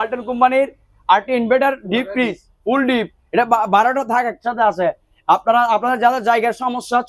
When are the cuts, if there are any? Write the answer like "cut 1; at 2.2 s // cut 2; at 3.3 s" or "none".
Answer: none